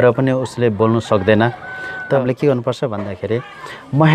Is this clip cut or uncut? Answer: cut